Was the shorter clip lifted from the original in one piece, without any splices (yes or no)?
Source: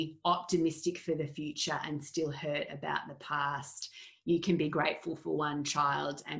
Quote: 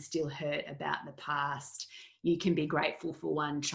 yes